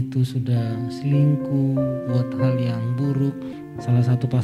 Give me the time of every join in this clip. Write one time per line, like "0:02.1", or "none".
0:03.5